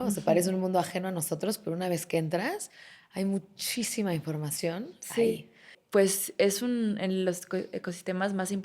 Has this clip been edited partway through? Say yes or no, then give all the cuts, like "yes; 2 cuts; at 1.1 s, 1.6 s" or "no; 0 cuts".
yes; 1 cut; at 5.7 s